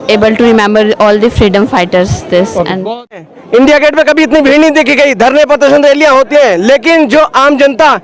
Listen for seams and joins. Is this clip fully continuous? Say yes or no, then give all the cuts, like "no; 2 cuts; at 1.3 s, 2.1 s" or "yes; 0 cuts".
no; 1 cut; at 3.3 s